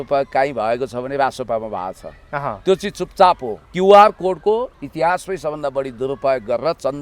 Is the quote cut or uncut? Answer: cut